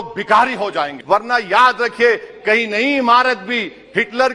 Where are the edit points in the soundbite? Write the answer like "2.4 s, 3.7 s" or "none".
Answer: 0.9 s